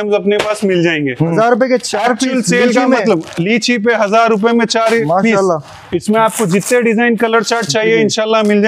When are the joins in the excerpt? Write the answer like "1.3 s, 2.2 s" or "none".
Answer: 1.2 s